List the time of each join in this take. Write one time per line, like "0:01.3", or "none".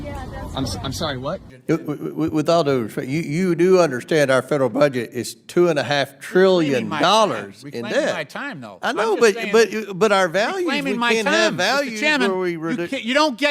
0:01.5